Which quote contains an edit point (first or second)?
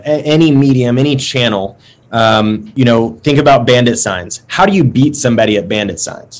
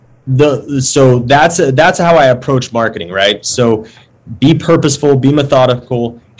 first